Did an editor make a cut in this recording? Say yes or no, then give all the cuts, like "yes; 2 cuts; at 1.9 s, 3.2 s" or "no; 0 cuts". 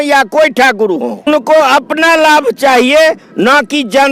yes; 1 cut; at 1.3 s